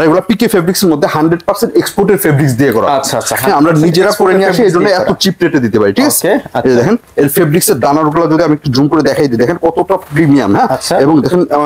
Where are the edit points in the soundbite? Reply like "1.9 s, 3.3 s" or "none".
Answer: none